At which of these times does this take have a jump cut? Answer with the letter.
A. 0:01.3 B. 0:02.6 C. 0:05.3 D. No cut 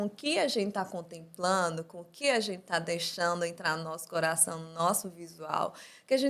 D